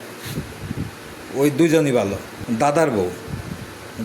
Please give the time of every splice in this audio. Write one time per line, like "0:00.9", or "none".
0:02.3